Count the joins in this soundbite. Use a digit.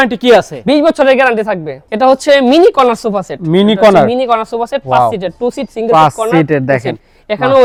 0